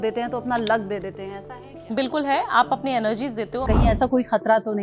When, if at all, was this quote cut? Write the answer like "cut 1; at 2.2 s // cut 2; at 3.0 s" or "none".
cut 1; at 3.6 s